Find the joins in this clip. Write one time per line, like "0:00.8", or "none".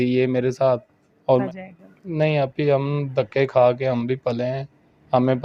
0:01.4